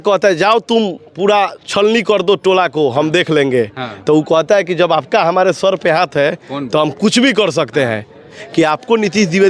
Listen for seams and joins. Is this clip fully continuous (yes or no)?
no